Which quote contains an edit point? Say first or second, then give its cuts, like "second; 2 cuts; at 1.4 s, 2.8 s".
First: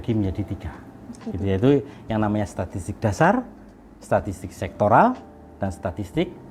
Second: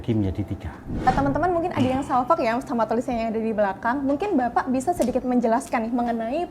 second; 1 cut; at 1.1 s